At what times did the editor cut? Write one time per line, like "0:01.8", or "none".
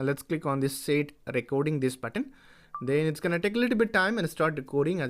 0:04.0